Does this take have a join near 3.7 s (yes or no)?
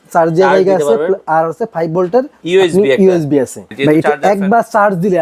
yes